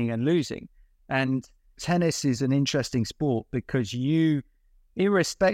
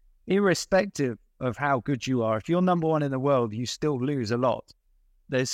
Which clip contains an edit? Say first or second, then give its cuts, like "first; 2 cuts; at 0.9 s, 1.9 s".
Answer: first; 1 cut; at 1.8 s